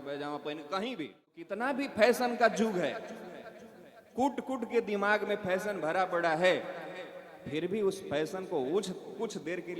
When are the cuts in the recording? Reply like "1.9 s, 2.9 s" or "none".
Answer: 1.7 s